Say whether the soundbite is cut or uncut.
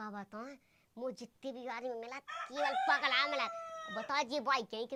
uncut